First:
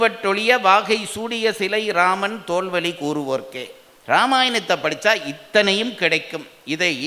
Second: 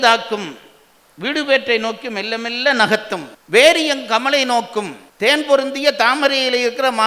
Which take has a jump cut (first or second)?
second